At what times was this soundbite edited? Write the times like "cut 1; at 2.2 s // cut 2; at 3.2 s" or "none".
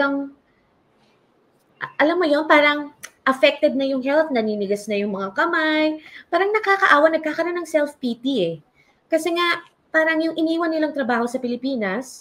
none

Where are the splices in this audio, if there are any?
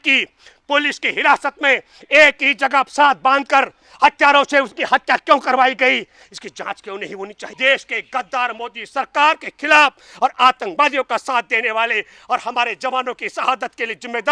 cut 1; at 7.5 s

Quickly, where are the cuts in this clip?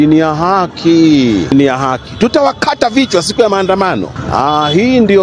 cut 1; at 1.5 s // cut 2; at 4.2 s

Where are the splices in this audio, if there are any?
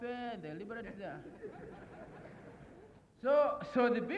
cut 1; at 3.0 s

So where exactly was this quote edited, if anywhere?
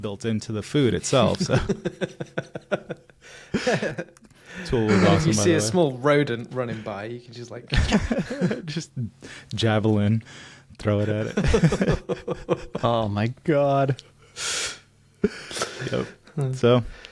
none

